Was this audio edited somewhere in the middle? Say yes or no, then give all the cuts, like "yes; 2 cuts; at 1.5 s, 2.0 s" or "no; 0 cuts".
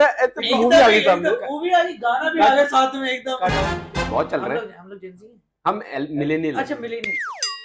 yes; 1 cut; at 3.9 s